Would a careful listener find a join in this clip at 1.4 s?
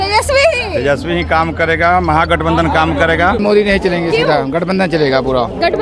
no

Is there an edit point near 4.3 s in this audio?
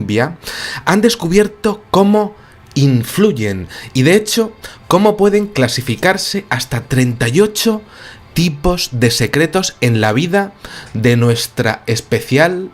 yes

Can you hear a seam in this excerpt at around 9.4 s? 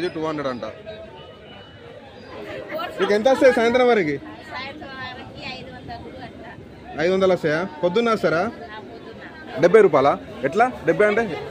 yes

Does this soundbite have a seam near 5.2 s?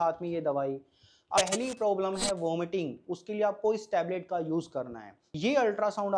yes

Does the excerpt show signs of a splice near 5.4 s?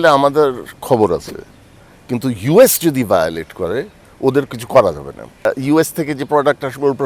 yes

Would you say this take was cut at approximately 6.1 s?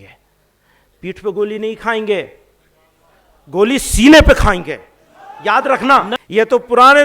yes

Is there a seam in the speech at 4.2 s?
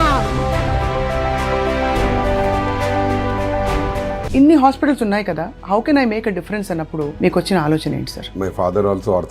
yes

